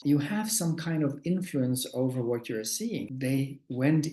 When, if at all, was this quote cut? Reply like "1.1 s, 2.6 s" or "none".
3.1 s